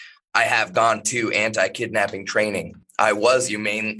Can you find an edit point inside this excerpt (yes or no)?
yes